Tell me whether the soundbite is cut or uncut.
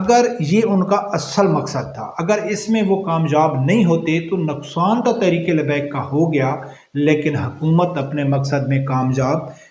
uncut